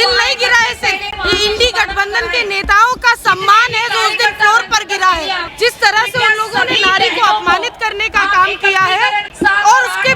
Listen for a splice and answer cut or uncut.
cut